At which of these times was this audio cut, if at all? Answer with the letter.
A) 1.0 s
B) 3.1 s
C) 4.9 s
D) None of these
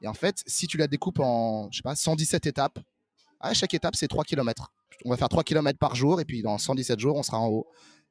C